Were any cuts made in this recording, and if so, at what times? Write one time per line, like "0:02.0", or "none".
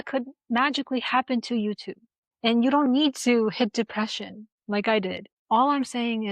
0:02.1
0:05.3